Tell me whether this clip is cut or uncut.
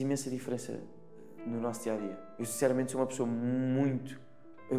uncut